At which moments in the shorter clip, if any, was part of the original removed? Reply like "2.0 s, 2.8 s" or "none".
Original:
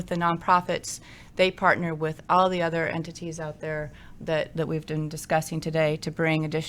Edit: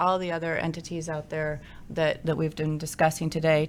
none